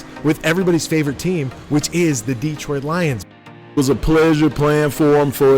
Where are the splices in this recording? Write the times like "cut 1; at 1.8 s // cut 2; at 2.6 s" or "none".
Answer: cut 1; at 3.8 s